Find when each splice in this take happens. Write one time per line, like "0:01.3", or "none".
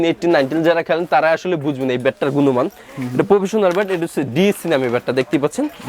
none